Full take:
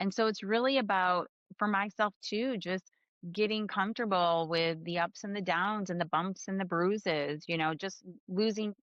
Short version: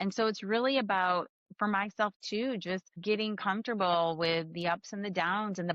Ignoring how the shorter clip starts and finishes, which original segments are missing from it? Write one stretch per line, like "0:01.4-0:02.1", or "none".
0:02.9-0:03.2